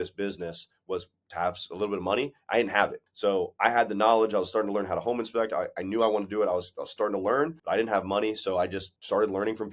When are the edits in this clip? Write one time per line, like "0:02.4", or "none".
0:07.6